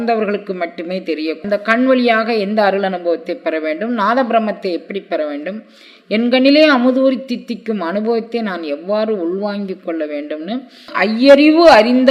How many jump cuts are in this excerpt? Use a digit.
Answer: 2